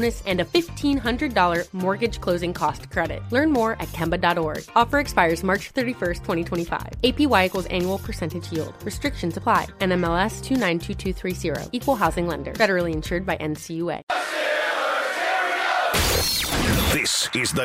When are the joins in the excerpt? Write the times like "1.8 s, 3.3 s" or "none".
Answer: 14.1 s